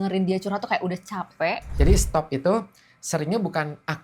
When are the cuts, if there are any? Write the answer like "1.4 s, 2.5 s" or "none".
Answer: 1.7 s